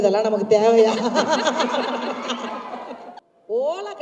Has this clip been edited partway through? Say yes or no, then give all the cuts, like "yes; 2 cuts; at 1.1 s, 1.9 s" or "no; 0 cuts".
yes; 1 cut; at 3.1 s